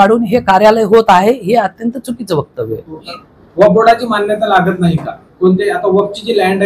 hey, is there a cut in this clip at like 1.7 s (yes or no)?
no